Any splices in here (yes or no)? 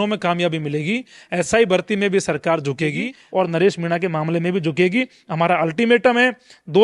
yes